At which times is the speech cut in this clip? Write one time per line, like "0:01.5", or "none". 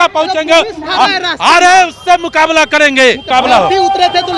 0:03.2